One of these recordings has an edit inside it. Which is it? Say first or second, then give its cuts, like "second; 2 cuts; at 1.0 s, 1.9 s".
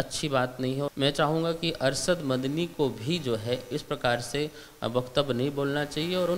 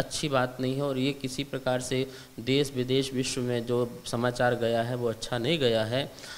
first; 1 cut; at 0.9 s